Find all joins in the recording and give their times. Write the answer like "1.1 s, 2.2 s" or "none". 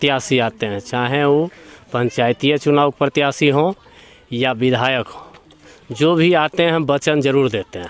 none